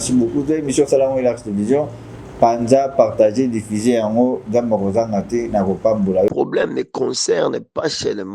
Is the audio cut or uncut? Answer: cut